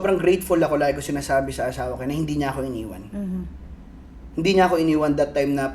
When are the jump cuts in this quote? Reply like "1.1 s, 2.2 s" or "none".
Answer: none